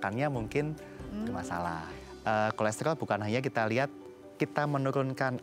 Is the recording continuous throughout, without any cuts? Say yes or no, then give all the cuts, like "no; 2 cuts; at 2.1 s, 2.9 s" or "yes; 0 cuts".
no; 1 cut; at 2.0 s